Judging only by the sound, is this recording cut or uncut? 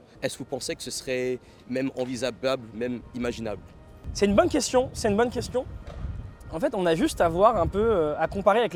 uncut